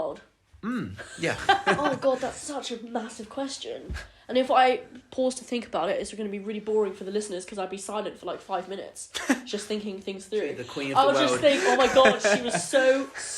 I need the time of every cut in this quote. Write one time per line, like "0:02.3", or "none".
0:01.6
0:10.7